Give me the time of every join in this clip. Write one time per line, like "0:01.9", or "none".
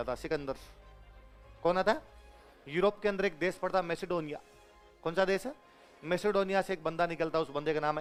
none